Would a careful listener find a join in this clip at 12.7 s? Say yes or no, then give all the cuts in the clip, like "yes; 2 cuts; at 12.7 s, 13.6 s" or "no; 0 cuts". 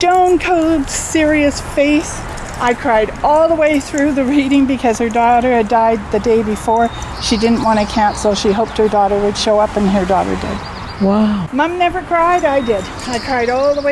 no; 1 cut; at 11.4 s